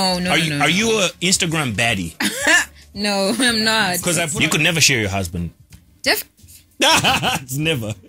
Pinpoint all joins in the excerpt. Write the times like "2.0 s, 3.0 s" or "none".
4.2 s